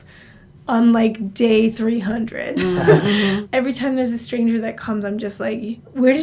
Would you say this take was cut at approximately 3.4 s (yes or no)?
yes